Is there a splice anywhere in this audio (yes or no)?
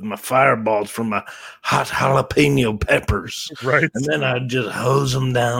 no